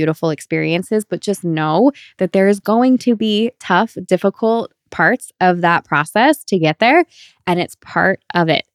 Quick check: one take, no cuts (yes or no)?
yes